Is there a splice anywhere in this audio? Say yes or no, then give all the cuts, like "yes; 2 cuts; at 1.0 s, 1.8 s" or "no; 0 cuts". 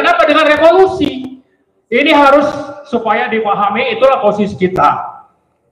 no; 0 cuts